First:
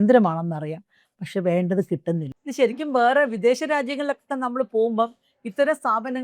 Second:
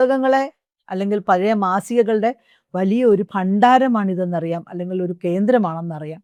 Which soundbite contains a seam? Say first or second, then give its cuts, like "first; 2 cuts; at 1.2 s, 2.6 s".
first; 1 cut; at 2.4 s